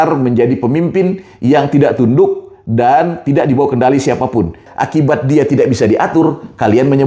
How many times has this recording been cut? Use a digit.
1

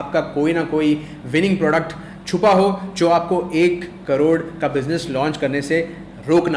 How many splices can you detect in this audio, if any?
0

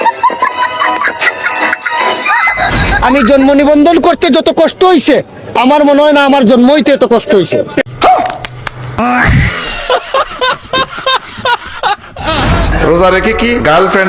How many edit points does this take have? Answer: 2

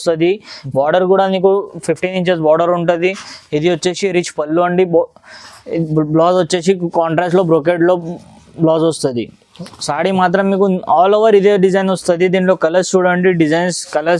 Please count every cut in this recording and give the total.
0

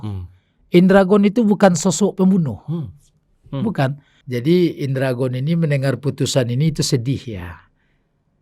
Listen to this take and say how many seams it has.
1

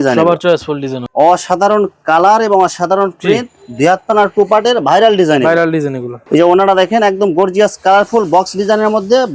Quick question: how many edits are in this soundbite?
2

